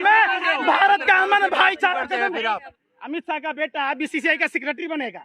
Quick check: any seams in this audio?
yes; 1 cut; at 2.7 s

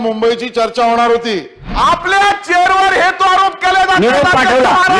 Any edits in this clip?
yes; 1 cut; at 1.6 s

